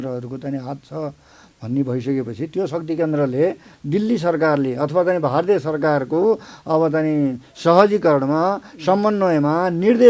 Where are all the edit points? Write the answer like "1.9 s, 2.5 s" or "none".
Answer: 3.8 s